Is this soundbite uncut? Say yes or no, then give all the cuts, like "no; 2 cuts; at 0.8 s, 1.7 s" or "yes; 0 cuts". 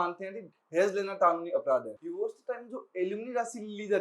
no; 1 cut; at 2.0 s